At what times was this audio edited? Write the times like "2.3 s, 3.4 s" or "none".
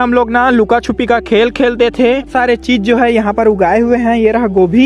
2.3 s